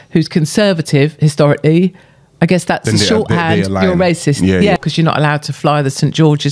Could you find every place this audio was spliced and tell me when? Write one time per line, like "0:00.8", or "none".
0:04.8